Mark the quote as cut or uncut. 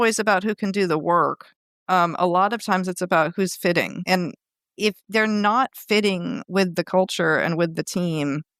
cut